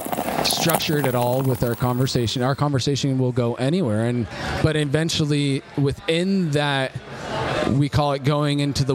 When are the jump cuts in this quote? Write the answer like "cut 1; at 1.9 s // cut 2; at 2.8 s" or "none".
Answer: cut 1; at 4.4 s